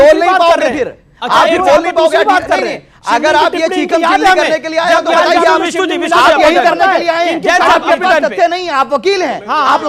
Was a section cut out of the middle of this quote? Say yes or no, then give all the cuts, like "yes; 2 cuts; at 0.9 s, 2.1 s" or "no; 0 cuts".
no; 0 cuts